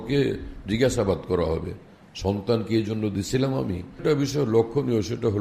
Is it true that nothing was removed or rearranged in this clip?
no; 1 cut; at 4.0 s

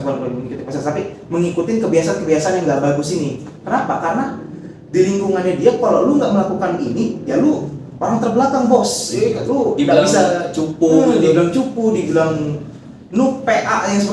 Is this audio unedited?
yes; 0 cuts

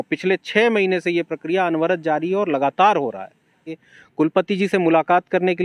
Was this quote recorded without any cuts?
no; 1 cut; at 3.8 s

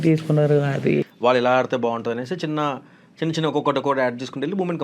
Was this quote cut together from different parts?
yes; 1 cut; at 1.1 s

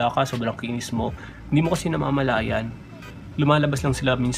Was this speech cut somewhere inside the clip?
no; 0 cuts

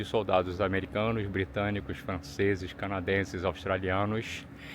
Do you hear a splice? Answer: no; 0 cuts

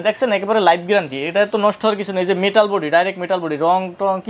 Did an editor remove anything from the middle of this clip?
no; 0 cuts

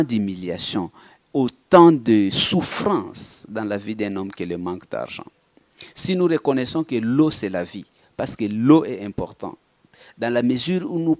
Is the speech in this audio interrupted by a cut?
no; 0 cuts

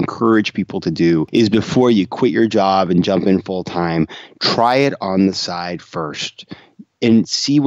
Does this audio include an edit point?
yes; 1 cut; at 1.3 s

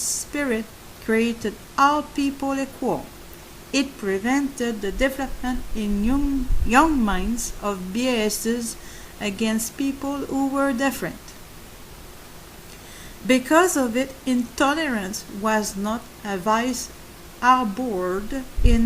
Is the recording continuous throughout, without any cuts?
no; 1 cut; at 14.3 s

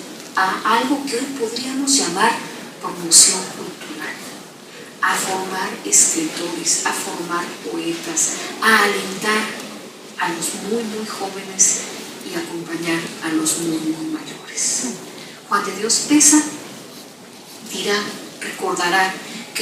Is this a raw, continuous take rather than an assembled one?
no; 1 cut; at 2.4 s

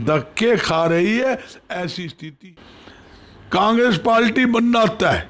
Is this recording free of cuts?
no; 1 cut; at 2.4 s

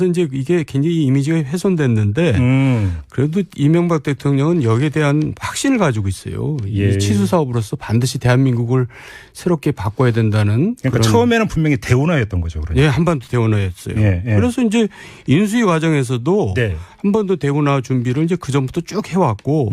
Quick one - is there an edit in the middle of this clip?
yes; 1 cut; at 2.0 s

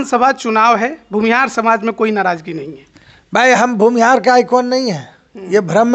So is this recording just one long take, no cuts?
yes; 0 cuts

